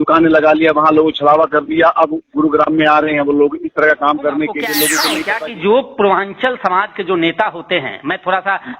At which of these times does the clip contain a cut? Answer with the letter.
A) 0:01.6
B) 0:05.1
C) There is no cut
B